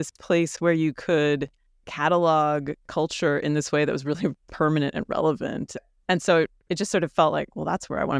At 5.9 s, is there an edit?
yes; 1 cut; at 5.9 s

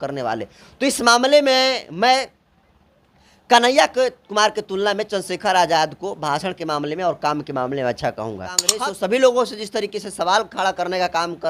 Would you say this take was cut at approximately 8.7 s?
yes; 1 cut; at 8.7 s

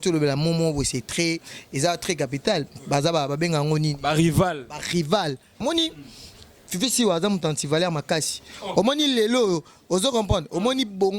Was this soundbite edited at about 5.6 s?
yes; 1 cut; at 5.6 s

